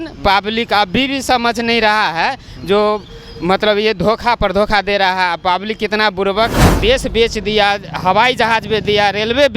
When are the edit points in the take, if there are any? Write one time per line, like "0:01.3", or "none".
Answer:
0:06.6